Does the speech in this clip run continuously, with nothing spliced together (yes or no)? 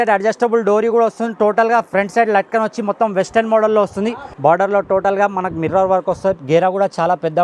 no